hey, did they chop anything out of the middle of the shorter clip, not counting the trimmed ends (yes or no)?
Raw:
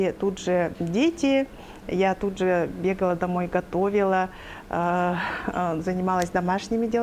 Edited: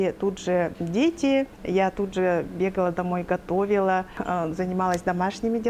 yes